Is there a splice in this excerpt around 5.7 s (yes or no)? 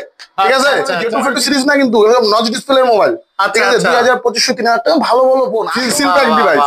yes